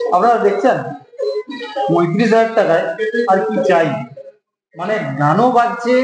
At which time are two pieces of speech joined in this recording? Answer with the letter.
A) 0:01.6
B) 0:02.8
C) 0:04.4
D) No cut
D